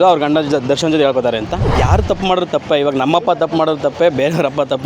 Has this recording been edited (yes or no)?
yes